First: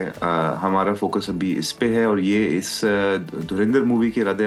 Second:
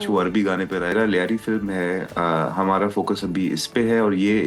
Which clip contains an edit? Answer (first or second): second